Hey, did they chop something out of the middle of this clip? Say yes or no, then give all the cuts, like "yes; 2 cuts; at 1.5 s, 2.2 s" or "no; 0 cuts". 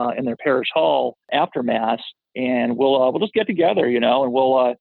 yes; 1 cut; at 1.3 s